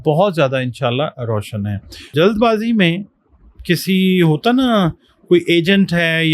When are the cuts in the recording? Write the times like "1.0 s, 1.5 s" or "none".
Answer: 2.2 s